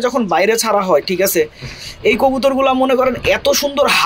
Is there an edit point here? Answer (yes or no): no